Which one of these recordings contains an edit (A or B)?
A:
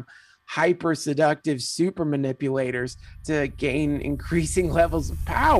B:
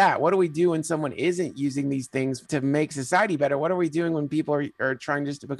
B